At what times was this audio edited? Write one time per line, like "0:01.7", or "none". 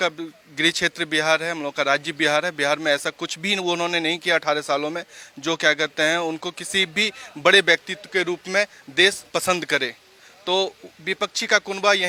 none